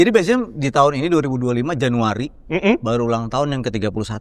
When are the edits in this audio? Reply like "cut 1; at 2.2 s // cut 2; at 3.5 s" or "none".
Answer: none